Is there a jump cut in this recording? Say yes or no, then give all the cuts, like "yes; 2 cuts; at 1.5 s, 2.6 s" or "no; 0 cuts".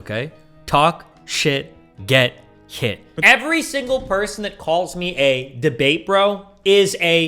yes; 1 cut; at 3.1 s